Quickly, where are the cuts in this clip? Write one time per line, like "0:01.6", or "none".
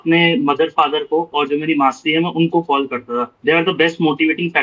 0:03.3